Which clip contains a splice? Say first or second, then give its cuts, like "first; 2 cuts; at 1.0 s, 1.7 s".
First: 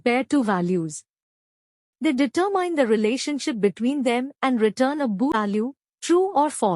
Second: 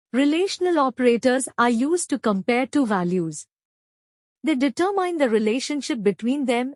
first; 1 cut; at 5.3 s